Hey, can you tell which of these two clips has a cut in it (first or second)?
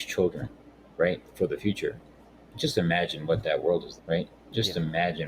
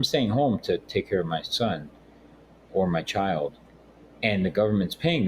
first